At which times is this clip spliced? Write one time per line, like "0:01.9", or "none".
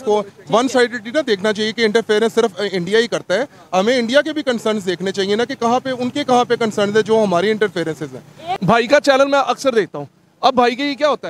0:08.4